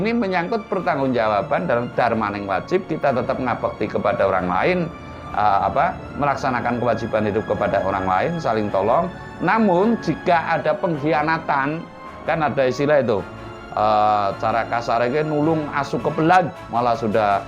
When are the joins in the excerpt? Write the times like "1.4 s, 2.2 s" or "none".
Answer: 16.6 s